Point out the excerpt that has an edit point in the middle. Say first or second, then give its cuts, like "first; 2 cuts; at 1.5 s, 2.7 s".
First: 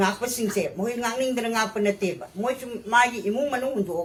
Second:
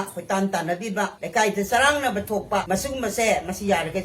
second; 2 cuts; at 1.2 s, 2.6 s